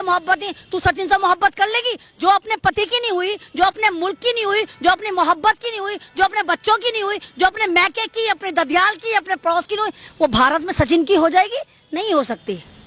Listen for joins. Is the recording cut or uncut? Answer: uncut